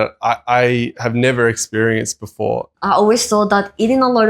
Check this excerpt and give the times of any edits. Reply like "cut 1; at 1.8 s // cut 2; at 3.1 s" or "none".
cut 1; at 2.7 s